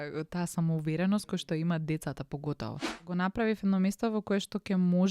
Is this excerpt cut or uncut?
cut